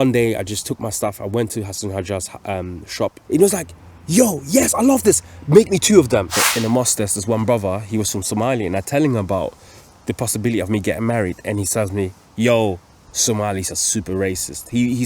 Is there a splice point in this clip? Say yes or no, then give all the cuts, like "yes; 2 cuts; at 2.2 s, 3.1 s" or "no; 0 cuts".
yes; 2 cuts; at 3.2 s, 6.4 s